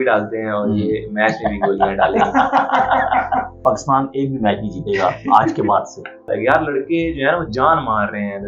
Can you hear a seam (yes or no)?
yes